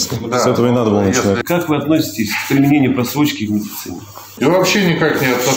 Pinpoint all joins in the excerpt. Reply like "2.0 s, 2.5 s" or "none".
1.4 s, 4.2 s